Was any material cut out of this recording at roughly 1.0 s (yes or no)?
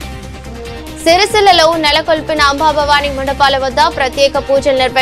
yes